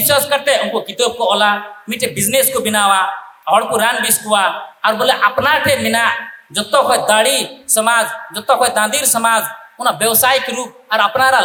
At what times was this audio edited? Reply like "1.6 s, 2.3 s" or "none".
none